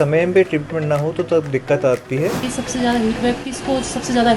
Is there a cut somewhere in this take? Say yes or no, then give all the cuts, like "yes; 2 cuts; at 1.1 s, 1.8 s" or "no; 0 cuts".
yes; 1 cut; at 2.5 s